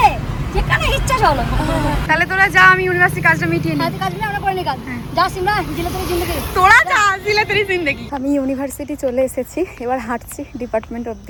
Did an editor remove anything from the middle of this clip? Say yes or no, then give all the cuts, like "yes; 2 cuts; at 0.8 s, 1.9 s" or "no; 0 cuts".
no; 0 cuts